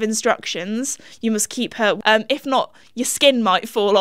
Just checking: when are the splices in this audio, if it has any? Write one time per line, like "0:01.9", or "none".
0:02.0

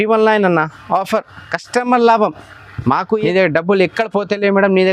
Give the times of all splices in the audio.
0:03.2

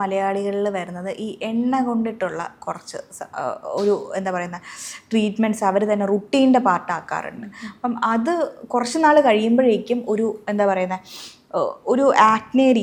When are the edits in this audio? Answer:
none

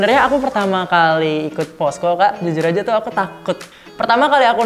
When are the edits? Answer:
0:03.7

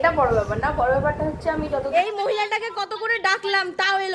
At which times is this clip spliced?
0:01.9

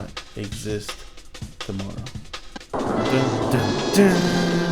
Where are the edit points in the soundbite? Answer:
0:02.5

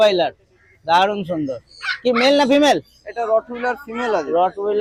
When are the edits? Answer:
none

